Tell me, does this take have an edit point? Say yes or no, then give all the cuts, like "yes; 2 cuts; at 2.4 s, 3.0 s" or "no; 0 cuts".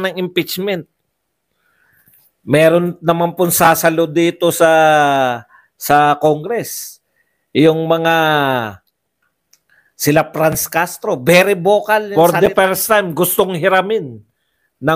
yes; 1 cut; at 12.1 s